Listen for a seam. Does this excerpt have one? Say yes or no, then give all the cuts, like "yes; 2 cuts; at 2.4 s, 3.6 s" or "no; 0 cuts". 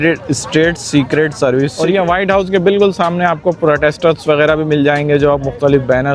yes; 1 cut; at 1.7 s